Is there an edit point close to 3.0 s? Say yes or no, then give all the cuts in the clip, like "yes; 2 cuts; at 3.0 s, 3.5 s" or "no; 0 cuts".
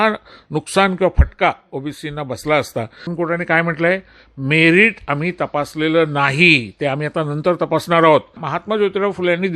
yes; 2 cuts; at 3.0 s, 8.5 s